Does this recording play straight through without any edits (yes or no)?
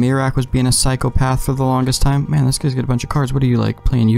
yes